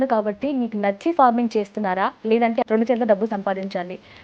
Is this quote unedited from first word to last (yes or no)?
no